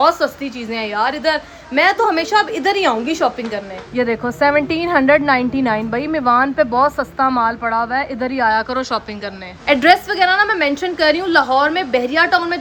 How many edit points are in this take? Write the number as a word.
zero